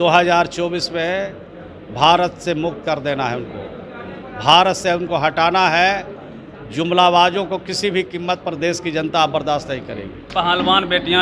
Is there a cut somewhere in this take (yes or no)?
yes